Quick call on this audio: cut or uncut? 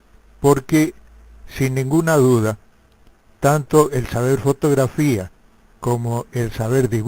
uncut